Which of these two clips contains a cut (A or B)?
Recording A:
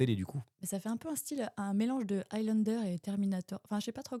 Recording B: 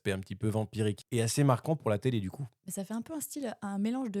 B